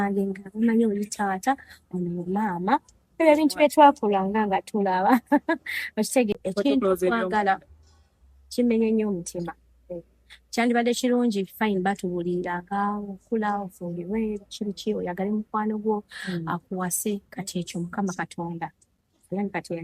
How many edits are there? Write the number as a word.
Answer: one